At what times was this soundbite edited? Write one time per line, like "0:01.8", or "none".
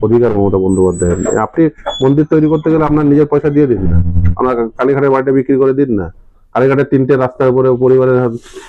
none